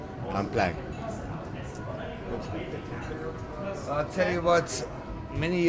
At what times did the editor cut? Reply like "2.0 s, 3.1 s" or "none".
1.6 s